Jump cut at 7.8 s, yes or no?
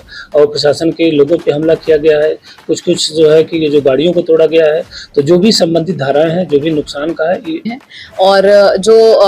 yes